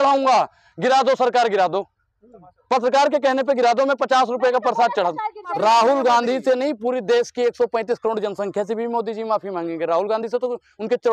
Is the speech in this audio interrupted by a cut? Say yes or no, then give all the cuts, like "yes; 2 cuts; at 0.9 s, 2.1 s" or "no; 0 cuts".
yes; 1 cut; at 5.5 s